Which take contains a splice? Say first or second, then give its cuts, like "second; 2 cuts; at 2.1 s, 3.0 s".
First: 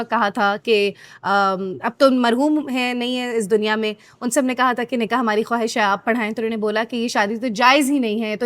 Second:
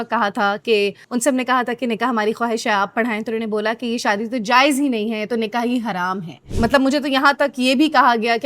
second; 2 cuts; at 1.0 s, 6.4 s